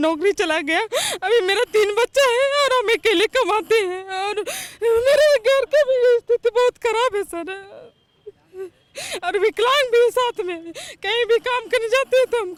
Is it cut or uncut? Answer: uncut